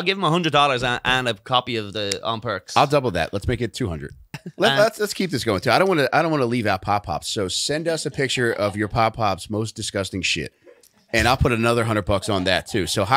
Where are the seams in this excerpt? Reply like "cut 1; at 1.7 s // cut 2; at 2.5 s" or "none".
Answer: cut 1; at 4.4 s